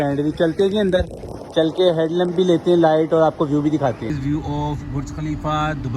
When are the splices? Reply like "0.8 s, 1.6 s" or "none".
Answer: 4.1 s